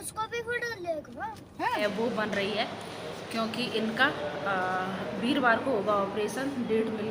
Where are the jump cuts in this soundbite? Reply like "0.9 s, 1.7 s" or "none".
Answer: 1.8 s